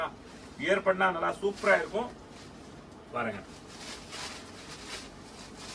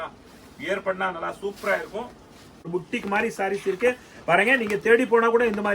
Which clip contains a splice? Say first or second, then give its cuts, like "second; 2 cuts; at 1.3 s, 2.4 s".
second; 1 cut; at 2.7 s